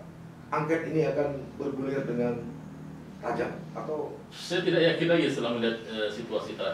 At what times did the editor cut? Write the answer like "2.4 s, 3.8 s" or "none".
none